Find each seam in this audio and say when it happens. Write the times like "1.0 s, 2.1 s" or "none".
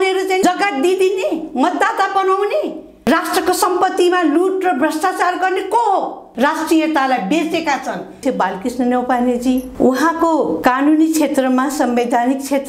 6.2 s, 8.2 s